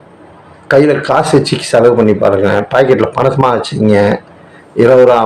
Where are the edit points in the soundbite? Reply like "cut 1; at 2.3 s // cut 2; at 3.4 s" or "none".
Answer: none